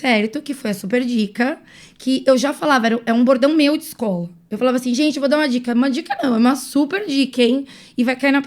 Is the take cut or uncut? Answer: uncut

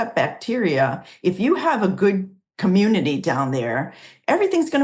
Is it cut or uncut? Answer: uncut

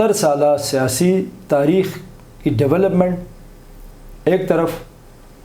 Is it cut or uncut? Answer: uncut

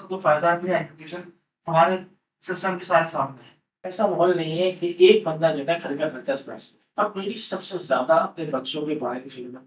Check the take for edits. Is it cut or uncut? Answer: cut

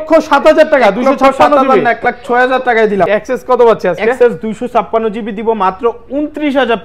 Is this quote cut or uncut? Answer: cut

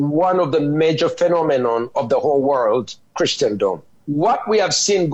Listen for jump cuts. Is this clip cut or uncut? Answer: cut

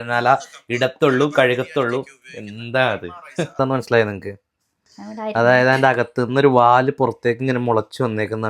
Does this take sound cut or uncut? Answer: cut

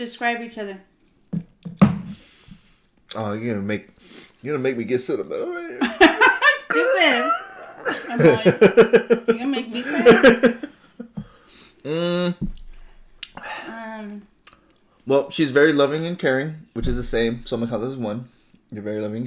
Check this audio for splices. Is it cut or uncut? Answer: uncut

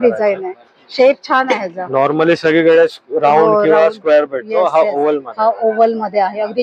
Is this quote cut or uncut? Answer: uncut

